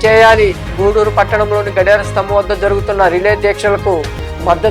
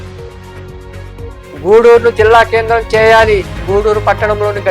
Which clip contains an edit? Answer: second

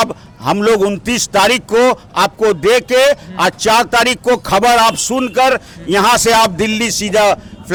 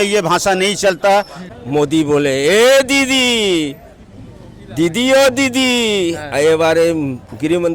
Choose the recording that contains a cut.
second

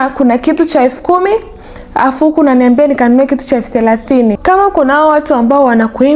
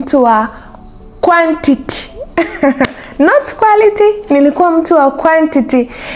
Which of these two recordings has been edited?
first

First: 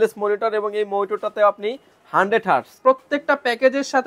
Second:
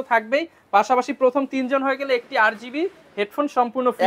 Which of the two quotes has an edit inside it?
first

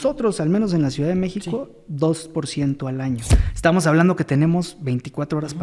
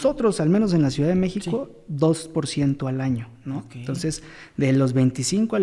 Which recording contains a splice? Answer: first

